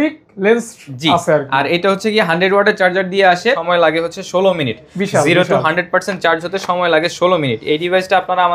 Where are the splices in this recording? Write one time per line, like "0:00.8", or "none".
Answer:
0:03.6